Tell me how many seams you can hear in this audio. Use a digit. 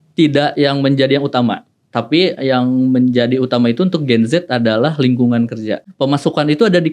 1